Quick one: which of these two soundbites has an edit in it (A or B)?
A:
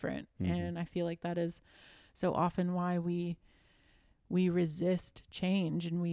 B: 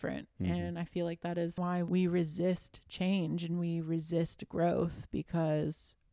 B